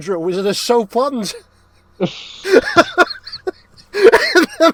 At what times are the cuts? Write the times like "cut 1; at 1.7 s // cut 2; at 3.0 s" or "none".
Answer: none